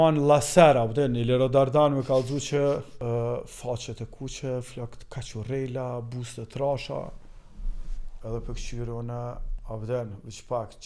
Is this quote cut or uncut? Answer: cut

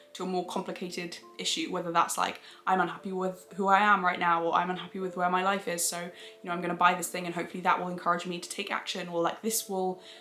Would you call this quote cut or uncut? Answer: uncut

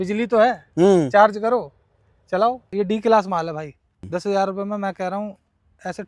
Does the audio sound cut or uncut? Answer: cut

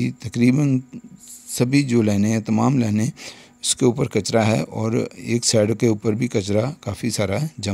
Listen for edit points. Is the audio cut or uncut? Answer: uncut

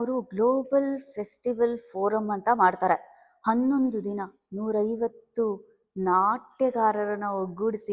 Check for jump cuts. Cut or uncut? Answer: uncut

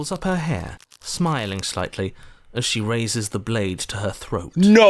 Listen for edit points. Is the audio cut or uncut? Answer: uncut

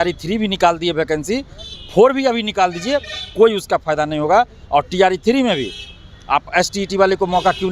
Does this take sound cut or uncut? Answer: uncut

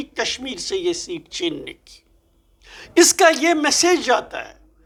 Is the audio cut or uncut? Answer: uncut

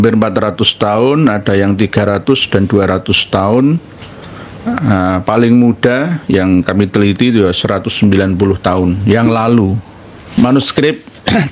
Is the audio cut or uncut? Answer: cut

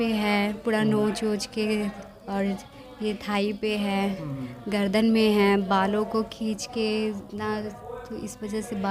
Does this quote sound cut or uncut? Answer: uncut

